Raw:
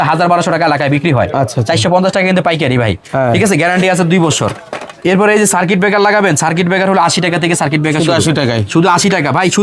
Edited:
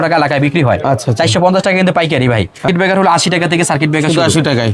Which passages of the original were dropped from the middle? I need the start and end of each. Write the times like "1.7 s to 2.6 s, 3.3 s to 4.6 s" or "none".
3.1 s to 6.6 s